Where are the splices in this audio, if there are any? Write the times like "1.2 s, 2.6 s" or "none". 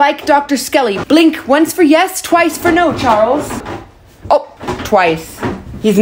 3.7 s